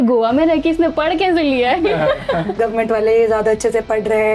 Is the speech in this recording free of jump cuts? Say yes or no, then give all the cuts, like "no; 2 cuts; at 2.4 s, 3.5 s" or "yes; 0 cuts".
no; 1 cut; at 2.5 s